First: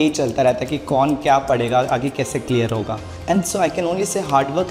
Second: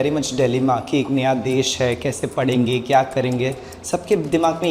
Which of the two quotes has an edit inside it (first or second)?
first